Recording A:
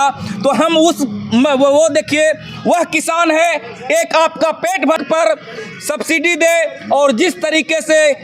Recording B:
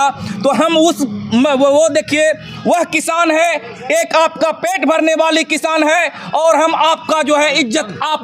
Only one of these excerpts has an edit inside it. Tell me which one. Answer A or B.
A